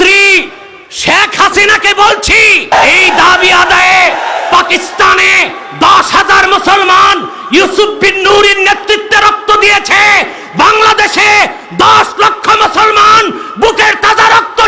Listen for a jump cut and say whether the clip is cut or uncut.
cut